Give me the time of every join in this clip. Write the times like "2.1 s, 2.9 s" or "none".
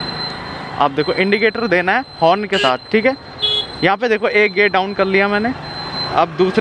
none